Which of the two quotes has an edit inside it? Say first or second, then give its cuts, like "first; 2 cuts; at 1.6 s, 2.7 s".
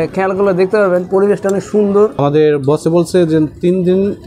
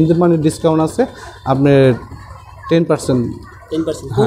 first; 1 cut; at 2.2 s